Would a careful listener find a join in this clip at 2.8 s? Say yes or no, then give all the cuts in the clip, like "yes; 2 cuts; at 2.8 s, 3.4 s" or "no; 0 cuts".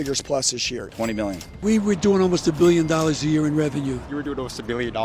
no; 2 cuts; at 1.0 s, 4.0 s